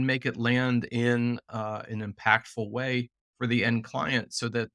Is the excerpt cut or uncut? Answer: uncut